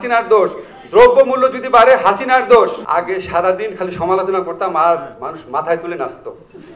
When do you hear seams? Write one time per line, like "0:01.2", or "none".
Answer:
0:02.8

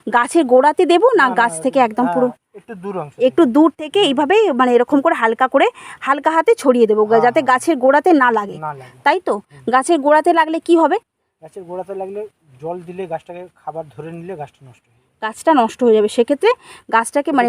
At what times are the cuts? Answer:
none

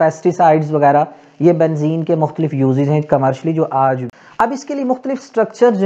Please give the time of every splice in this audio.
0:04.1

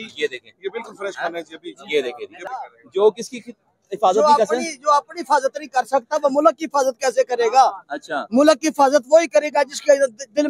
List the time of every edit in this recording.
0:02.5

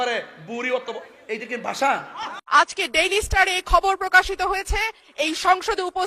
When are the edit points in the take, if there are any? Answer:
0:02.6

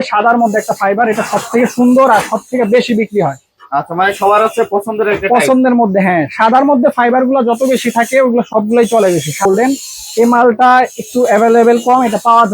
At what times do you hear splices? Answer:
0:09.5

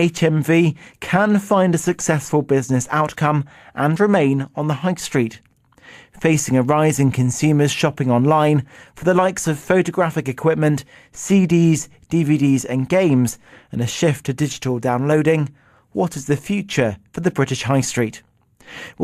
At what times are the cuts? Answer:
0:14.8

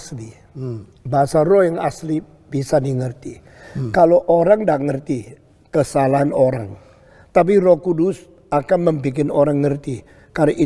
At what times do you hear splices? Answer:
0:03.2

